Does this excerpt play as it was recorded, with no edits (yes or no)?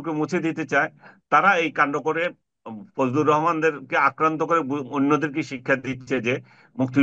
yes